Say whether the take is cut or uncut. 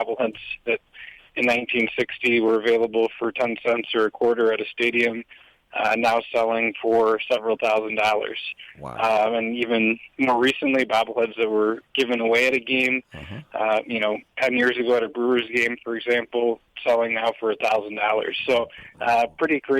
cut